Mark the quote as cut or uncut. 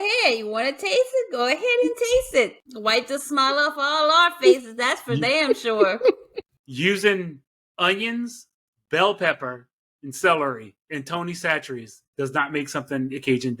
cut